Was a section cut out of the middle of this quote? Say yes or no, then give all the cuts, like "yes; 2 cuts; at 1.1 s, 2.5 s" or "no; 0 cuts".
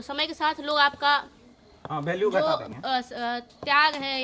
no; 0 cuts